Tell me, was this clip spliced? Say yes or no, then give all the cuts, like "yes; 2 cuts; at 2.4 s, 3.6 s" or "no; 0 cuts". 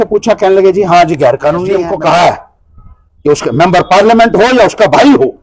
yes; 1 cut; at 1.9 s